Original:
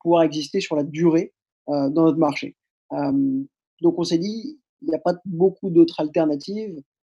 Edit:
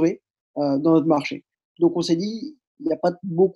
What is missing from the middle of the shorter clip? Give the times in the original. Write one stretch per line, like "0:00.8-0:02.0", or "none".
0:02.7-0:03.6

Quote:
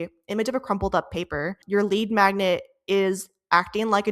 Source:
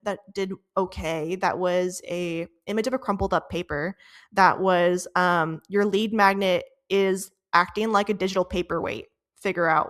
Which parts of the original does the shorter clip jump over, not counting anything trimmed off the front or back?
0:04.0-0:05.6

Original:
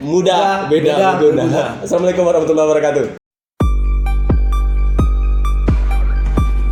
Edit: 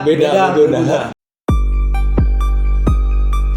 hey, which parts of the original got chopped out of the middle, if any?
0:01.8-0:03.2

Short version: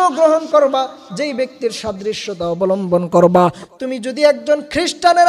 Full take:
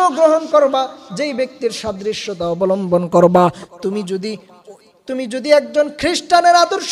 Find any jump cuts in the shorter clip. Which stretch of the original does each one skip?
0:03.7-0:04.9

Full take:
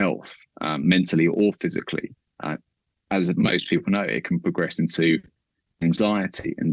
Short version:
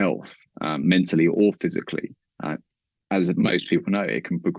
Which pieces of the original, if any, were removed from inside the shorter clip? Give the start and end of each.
none

